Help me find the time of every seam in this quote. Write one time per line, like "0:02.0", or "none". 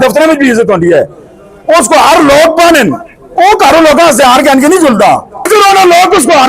0:05.5